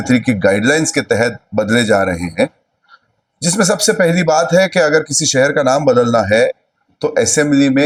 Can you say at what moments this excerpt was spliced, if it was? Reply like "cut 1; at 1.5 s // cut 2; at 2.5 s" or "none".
none